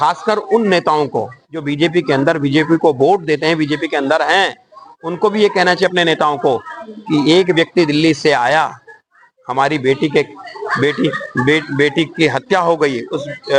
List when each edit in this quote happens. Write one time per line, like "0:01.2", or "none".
none

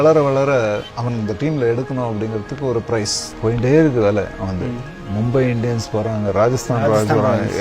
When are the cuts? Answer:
0:00.9
0:03.2

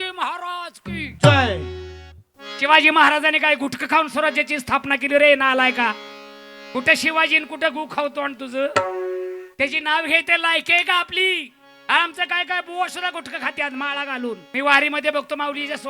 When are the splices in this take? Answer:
0:14.4

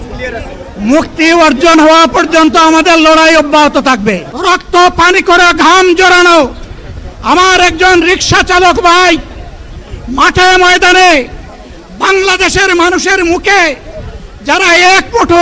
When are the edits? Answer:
0:04.3

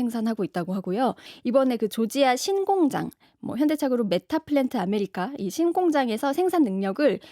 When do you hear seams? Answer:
0:01.3

